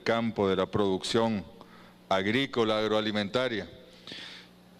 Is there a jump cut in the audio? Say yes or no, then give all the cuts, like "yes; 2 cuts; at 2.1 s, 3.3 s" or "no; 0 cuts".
yes; 1 cut; at 3.3 s